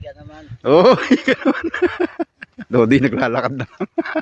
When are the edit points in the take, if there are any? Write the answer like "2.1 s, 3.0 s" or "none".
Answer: 2.6 s